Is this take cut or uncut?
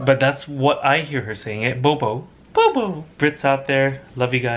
cut